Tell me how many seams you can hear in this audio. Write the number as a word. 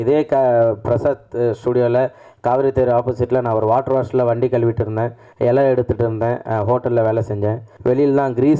two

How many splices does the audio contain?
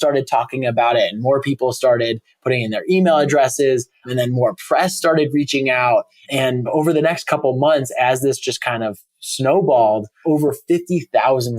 two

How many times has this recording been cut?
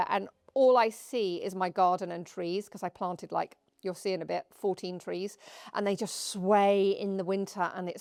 zero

